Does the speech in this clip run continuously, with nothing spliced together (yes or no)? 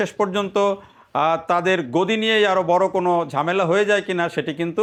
yes